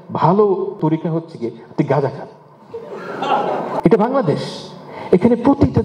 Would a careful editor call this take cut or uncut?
cut